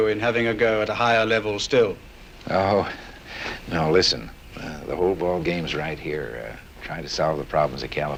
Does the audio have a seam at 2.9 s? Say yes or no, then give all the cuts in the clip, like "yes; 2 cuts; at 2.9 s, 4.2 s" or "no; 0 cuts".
no; 0 cuts